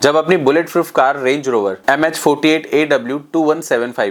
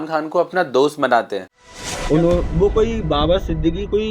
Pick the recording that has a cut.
second; 1 cut; at 1.5 s

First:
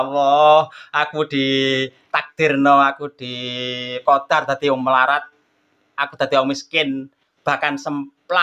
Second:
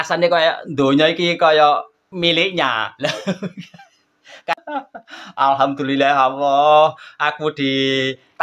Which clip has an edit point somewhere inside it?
second; 2 cuts; at 2.0 s, 4.5 s

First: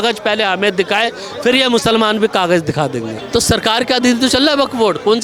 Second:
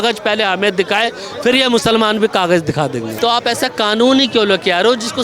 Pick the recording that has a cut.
second; 1 cut; at 3.1 s

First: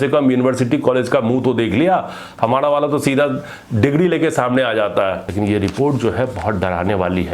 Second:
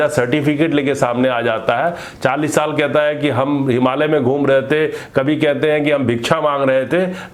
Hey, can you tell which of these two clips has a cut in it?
first; 1 cut; at 5.3 s

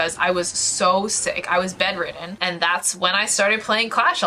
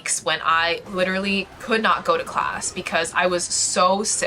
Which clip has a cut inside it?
first; 1 cut; at 2.3 s

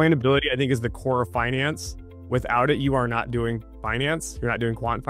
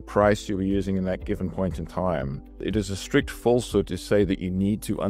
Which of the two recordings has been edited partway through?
second; 1 cut; at 2.7 s

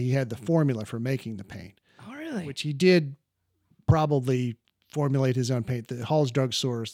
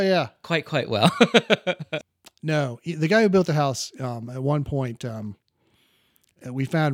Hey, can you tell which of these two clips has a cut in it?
second; 1 cut; at 1.9 s

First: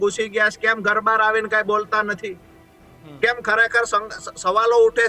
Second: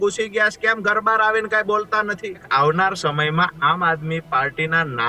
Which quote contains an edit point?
second; 1 cut; at 2.4 s

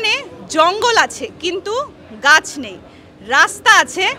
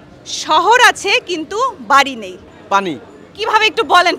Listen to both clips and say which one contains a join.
second; 1 cut; at 2.4 s

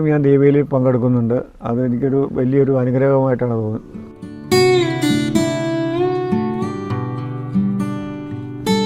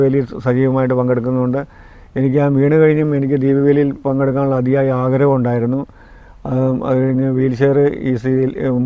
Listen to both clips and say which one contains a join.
first; 1 cut; at 4.3 s

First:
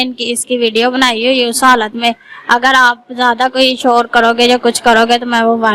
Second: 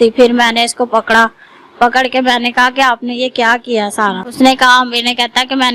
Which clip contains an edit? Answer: second; 1 cut; at 4.2 s

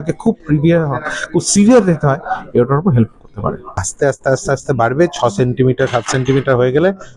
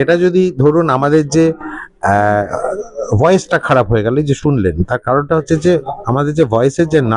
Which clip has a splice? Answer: first; 1 cut; at 3.8 s

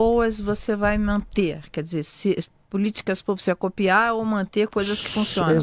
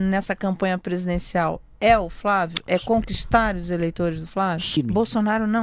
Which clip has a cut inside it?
second; 1 cut; at 4.7 s

